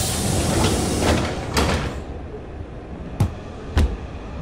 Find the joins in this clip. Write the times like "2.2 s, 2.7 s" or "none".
none